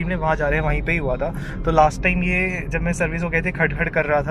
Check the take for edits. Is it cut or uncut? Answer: uncut